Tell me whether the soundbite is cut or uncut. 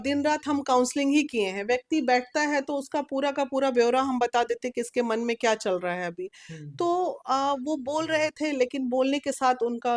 uncut